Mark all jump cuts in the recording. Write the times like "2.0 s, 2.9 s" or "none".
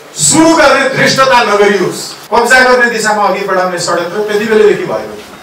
2.1 s